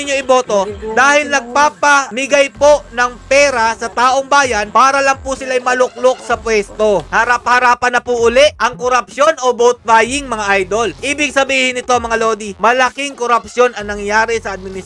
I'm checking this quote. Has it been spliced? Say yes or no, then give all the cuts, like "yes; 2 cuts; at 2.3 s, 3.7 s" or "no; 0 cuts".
yes; 2 cuts; at 7.1 s, 11.0 s